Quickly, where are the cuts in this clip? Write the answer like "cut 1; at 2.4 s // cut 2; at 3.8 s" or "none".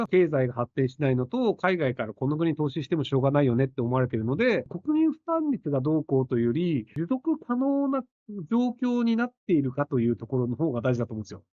cut 1; at 4.7 s // cut 2; at 6.9 s